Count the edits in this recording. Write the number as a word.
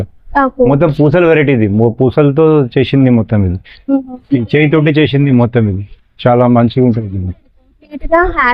zero